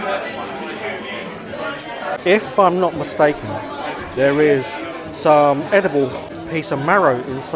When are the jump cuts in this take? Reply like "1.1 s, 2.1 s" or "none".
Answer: 2.2 s, 6.3 s